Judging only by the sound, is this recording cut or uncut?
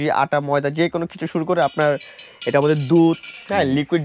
uncut